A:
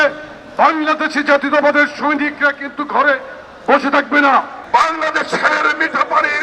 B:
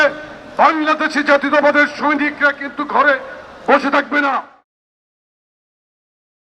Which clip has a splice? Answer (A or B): A